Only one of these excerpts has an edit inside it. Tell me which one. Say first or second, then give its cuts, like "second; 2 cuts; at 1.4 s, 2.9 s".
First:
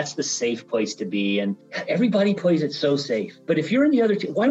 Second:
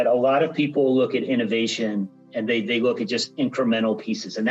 first; 2 cuts; at 1.7 s, 3.3 s